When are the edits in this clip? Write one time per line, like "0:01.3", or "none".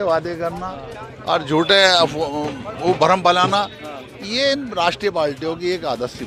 none